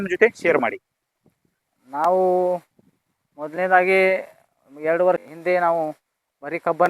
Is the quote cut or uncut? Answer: cut